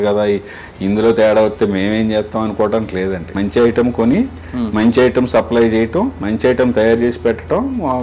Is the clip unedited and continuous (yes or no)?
no